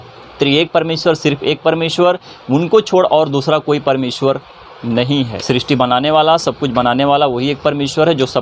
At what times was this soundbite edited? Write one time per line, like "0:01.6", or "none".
0:05.4